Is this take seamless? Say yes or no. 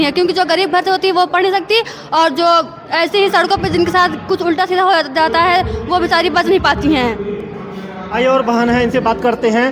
yes